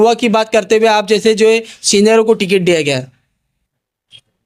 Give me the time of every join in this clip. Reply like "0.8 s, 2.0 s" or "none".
none